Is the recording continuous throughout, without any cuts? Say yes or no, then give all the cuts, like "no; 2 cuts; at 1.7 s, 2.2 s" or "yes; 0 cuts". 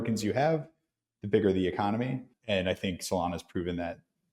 no; 1 cut; at 2.3 s